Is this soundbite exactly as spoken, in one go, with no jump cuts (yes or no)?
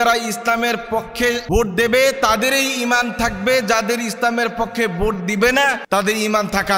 no